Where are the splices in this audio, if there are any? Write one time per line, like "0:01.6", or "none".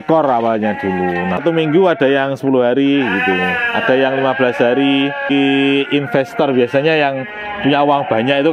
0:01.4
0:05.3